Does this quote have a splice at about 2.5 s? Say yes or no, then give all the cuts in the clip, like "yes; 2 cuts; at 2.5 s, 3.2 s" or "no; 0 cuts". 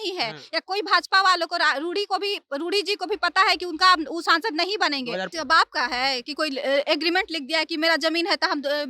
no; 1 cut; at 5.2 s